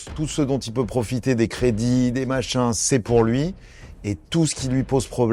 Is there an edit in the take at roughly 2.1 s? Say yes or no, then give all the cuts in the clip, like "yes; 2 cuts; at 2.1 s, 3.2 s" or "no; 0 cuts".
no; 0 cuts